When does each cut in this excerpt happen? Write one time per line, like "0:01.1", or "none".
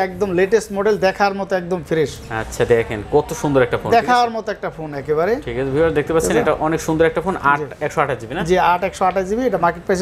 none